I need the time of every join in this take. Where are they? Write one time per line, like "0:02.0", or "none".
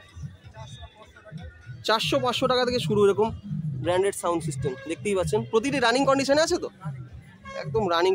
none